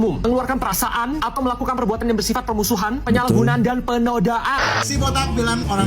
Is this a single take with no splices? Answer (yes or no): no